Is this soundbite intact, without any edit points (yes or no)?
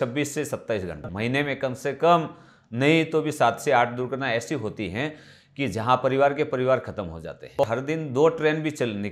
no